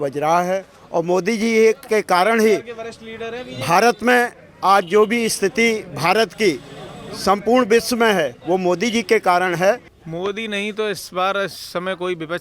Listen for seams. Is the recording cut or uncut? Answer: cut